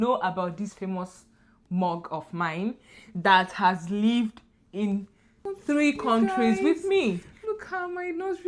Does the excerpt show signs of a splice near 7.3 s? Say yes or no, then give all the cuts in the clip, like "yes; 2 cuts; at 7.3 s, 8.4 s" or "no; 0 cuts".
yes; 1 cut; at 7.3 s